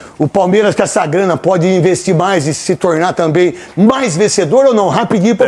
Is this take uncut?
yes; 0 cuts

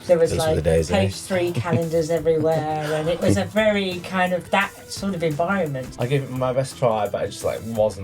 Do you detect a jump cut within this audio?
yes; 1 cut; at 5.9 s

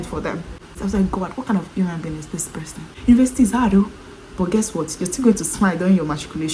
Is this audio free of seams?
no; 1 cut; at 2.9 s

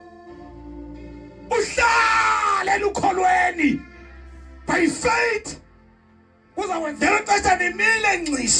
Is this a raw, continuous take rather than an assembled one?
no; 1 cut; at 6.9 s

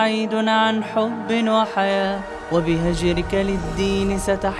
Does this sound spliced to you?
no; 0 cuts

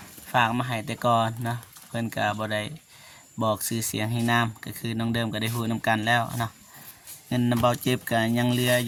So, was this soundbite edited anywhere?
no; 0 cuts

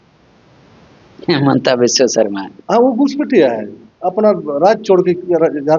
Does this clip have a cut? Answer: no; 0 cuts

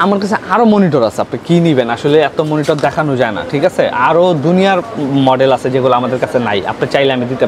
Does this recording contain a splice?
no; 0 cuts

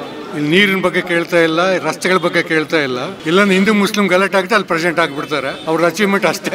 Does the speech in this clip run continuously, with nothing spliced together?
no; 2 cuts; at 3.1 s, 5.6 s

